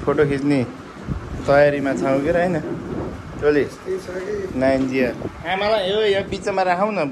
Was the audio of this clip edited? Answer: no; 0 cuts

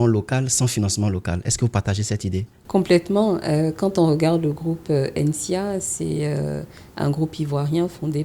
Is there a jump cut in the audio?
yes; 1 cut; at 2.6 s

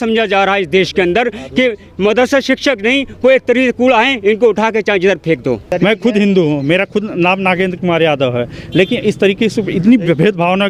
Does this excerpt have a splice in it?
yes; 1 cut; at 5.7 s

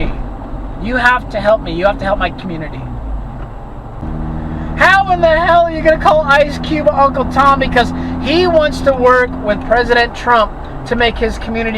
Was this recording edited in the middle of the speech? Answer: yes; 1 cut; at 4.0 s

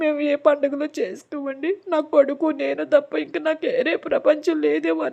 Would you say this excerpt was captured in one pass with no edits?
yes; 0 cuts

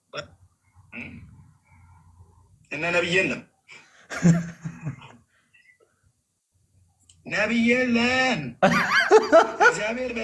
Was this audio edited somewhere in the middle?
no; 0 cuts

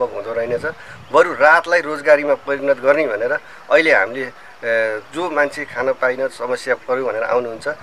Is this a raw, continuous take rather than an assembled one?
yes; 0 cuts

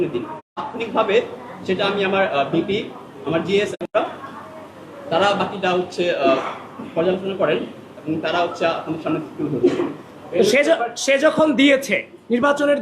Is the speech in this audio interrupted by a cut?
no; 0 cuts

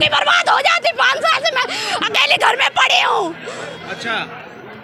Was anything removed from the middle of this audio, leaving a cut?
no; 0 cuts

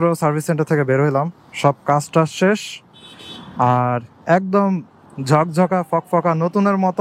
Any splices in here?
no; 0 cuts

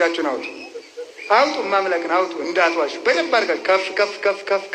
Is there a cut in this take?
no; 0 cuts

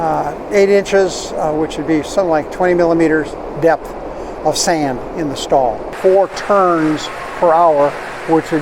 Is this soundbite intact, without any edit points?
no; 1 cut; at 5.9 s

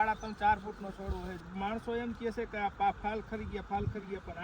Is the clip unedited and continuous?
no; 1 cut; at 1.4 s

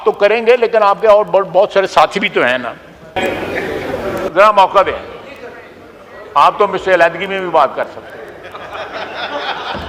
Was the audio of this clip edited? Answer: yes; 1 cut; at 3.1 s

